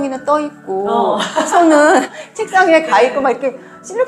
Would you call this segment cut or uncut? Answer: cut